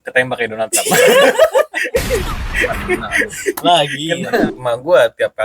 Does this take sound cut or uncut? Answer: cut